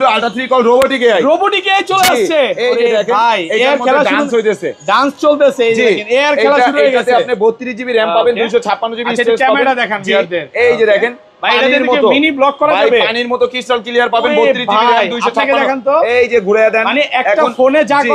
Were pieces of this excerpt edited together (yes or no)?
no